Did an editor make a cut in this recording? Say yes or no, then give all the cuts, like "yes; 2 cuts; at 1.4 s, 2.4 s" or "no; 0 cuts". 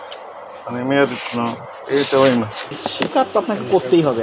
yes; 1 cut; at 2.7 s